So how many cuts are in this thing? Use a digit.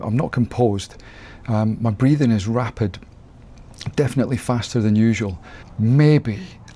1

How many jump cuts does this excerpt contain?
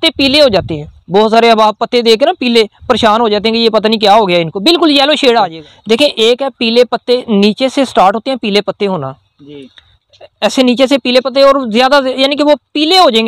1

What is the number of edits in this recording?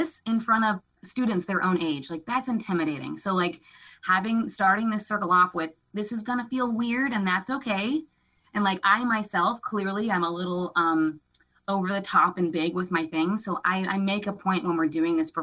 1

